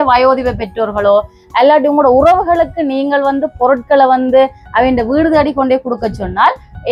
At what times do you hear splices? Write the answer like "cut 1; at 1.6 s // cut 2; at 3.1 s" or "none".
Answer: none